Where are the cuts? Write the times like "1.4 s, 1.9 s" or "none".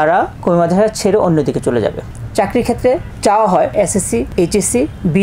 2.1 s, 3.9 s